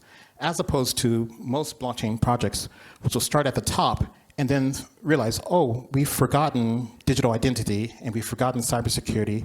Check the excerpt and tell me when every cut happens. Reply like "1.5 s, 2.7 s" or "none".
1.4 s

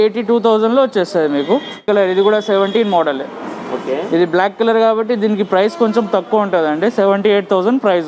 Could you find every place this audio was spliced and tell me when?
1.8 s

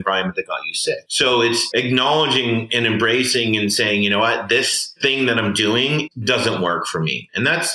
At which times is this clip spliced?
1.6 s, 4.9 s, 6.1 s

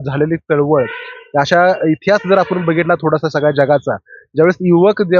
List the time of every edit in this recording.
none

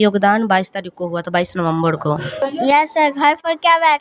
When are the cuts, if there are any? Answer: 2.4 s

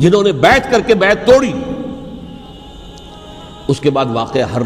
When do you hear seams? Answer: 2.5 s

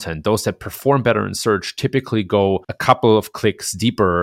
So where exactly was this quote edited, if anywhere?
2.7 s

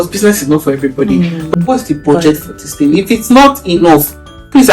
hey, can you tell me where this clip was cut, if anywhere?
1.6 s

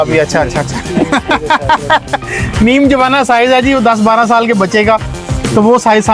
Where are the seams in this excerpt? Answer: none

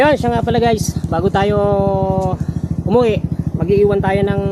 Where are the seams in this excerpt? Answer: none

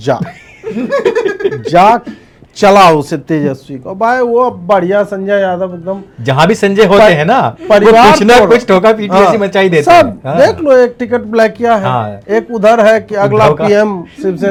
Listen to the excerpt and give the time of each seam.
none

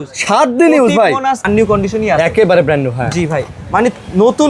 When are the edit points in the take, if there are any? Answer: 1.4 s

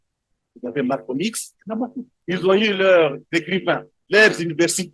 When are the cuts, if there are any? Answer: 2.1 s, 3.9 s

